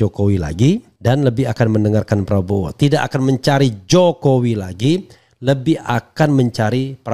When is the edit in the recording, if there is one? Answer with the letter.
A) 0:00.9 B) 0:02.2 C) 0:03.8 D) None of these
A